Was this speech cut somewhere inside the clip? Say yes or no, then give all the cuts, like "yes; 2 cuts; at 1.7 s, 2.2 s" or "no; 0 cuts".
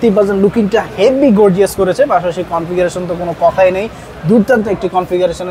no; 0 cuts